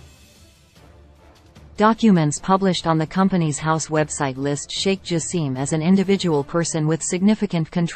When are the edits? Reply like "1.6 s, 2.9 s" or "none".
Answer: 1.7 s